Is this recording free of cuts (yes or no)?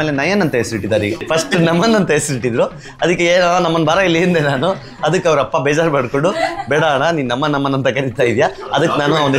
no